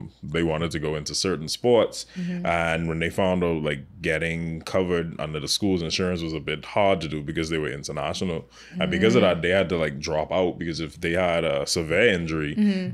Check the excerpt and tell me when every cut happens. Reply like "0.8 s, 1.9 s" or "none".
none